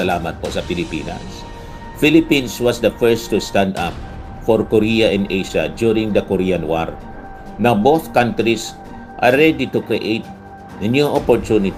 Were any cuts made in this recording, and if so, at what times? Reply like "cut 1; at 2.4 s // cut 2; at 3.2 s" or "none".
none